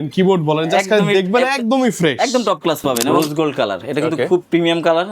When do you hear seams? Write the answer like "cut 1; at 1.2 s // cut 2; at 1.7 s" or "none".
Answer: cut 1; at 3.1 s